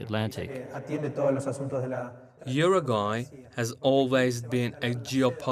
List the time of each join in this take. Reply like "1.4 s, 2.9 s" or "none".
none

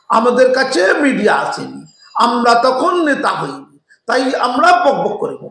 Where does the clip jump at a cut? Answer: none

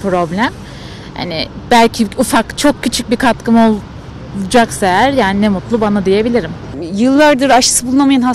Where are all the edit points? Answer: 6.6 s

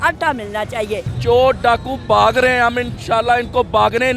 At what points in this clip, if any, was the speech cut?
1.2 s, 3.0 s

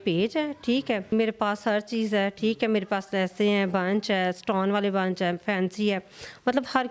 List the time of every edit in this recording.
none

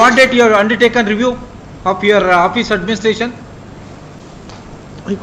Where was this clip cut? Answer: 4.2 s

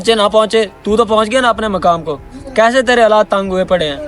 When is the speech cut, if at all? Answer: none

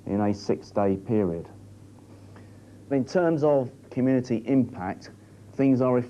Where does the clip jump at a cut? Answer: none

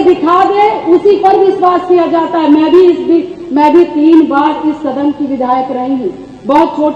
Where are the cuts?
none

